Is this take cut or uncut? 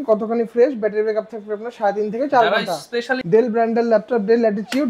cut